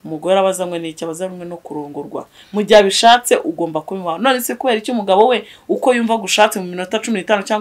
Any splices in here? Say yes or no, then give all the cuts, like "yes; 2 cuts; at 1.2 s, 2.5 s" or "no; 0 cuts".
no; 0 cuts